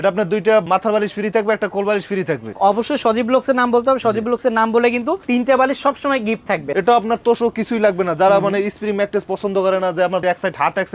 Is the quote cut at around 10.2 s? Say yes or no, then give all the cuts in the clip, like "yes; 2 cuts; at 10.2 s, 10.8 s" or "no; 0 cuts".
yes; 3 cuts; at 2.5 s, 6.7 s, 10.2 s